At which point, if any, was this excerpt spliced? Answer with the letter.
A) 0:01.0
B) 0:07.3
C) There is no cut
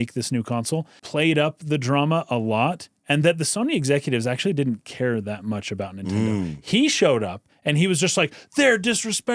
A